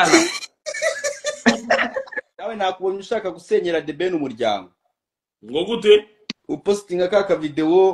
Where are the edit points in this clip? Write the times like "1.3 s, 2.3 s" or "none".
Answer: 2.4 s, 6.6 s